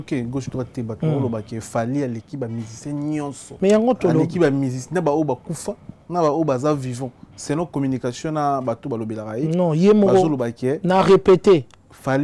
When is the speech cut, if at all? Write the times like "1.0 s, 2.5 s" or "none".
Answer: 3.4 s